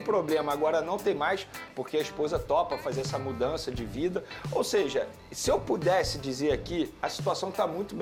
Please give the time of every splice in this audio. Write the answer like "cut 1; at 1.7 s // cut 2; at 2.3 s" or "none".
none